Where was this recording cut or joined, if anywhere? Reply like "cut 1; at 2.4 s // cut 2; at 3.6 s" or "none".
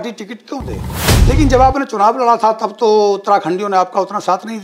cut 1; at 1.1 s